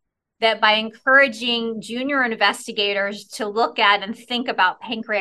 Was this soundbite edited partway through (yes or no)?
no